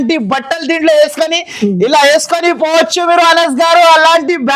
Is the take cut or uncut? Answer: uncut